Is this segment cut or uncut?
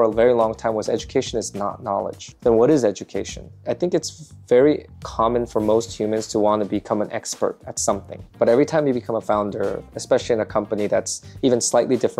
cut